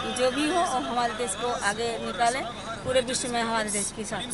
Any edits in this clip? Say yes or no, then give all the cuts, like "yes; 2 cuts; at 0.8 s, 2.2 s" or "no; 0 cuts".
no; 0 cuts